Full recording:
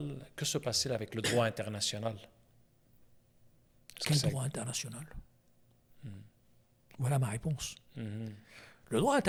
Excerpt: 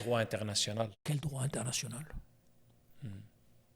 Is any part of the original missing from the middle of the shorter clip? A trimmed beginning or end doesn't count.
yes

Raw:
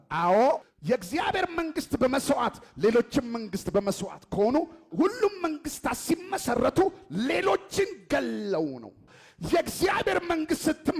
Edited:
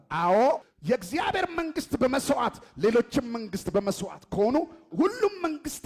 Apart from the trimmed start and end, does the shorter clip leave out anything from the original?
no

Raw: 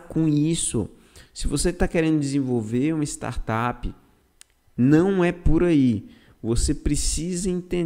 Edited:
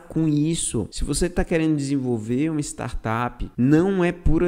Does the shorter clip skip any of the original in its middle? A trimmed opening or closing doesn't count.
yes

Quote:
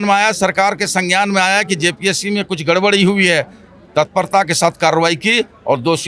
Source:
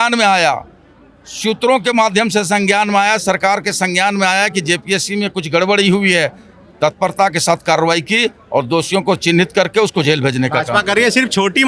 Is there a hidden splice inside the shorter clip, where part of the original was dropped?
no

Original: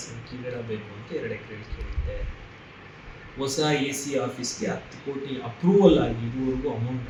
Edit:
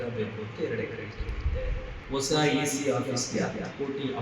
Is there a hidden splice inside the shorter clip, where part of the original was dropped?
yes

